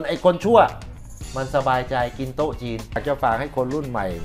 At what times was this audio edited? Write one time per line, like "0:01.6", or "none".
0:03.0